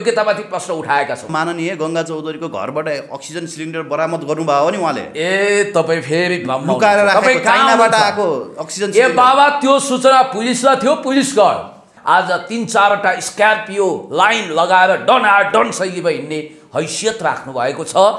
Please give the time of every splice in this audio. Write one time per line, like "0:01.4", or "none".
0:01.3
0:11.9